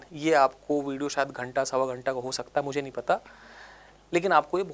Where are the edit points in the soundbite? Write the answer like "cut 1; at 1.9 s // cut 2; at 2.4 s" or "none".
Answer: none